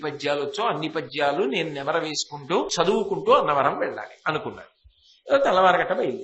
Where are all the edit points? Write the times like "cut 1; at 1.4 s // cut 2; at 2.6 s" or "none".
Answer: cut 1; at 2.7 s